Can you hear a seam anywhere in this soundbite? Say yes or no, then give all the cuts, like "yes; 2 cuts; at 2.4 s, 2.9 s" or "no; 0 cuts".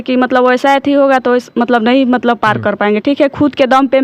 no; 0 cuts